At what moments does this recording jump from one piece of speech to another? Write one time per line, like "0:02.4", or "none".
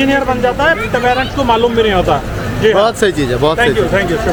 none